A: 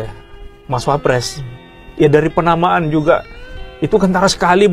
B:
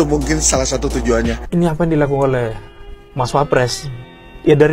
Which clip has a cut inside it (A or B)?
B